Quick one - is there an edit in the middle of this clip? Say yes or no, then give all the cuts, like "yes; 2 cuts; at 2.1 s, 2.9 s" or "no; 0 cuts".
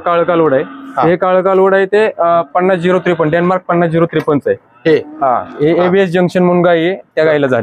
no; 0 cuts